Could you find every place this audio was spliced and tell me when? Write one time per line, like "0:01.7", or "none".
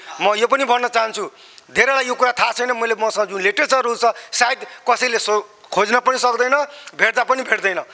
none

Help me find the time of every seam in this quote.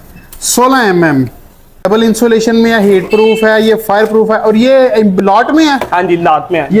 0:01.8

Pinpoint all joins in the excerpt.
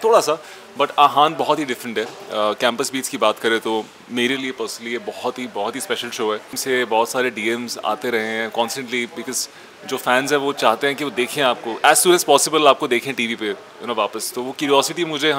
0:06.6

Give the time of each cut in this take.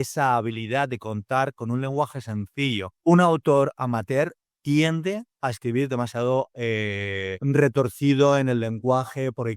0:03.0
0:07.4

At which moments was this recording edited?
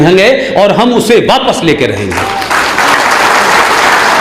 none

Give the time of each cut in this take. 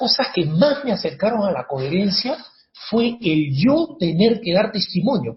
none

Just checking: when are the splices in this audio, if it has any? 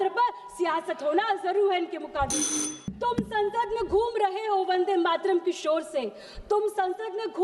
0:02.9

